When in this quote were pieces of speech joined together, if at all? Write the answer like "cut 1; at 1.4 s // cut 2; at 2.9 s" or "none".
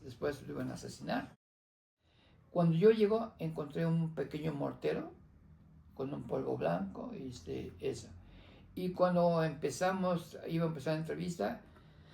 cut 1; at 1.8 s